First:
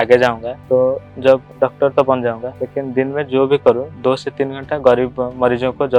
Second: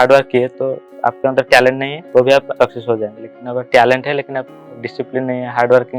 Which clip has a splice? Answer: second; 3 cuts; at 0.8 s, 1.9 s, 2.5 s

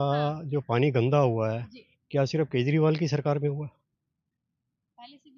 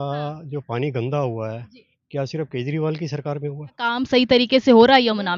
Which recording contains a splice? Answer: second; 1 cut; at 4.0 s

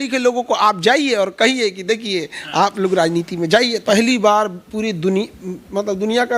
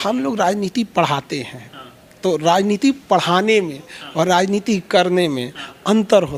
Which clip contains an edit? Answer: first; 1 cut; at 3.8 s

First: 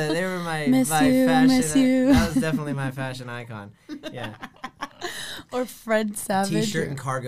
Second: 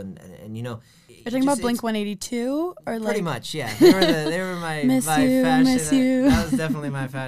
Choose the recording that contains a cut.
second; 1 cut; at 1.0 s

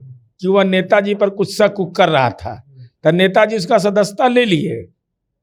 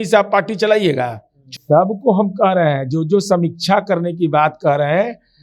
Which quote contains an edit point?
second; 1 cut; at 1.6 s

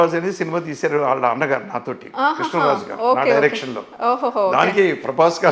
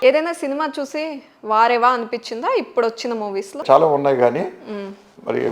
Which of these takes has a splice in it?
second; 1 cut; at 3.6 s

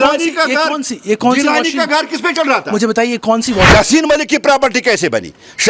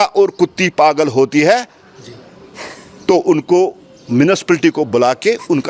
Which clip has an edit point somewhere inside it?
first; 1 cut; at 3.7 s

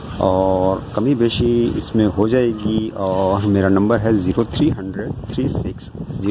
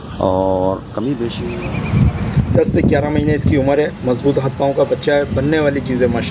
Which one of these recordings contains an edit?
second; 1 cut; at 1.4 s

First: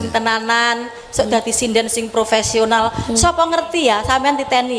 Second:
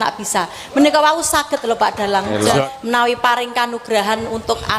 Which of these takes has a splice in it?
second; 1 cut; at 2.7 s

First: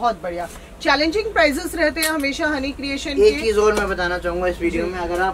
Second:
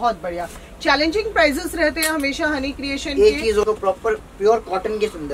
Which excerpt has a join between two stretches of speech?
second; 1 cut; at 3.6 s

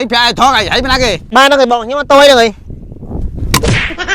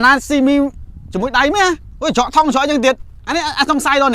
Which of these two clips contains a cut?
first; 1 cut; at 1.2 s

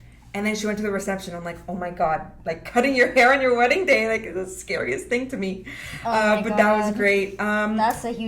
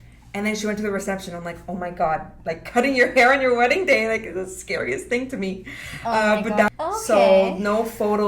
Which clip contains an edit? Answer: second; 1 cut; at 6.7 s

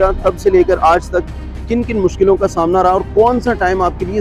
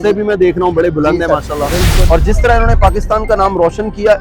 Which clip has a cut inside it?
second; 1 cut; at 2.0 s

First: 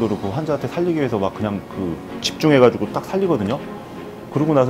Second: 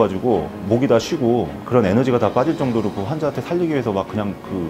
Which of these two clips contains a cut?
second; 1 cut; at 1.6 s

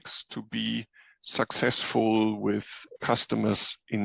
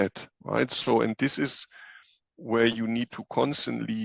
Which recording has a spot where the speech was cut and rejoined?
first; 1 cut; at 3.0 s

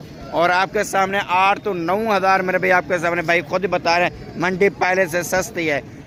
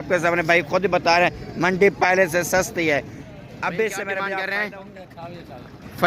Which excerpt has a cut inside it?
second; 1 cut; at 4.3 s

